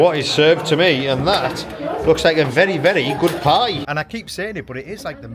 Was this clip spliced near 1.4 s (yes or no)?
no